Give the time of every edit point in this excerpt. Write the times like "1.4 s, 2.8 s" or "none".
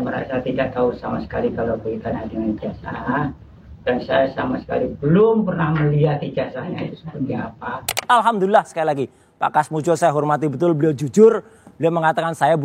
8.0 s